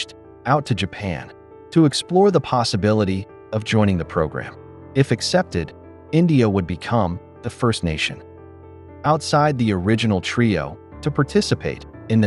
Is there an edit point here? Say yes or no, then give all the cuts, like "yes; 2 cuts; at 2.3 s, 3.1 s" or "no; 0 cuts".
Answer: no; 0 cuts